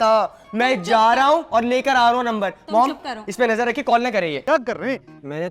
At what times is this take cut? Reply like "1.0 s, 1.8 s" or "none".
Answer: 4.4 s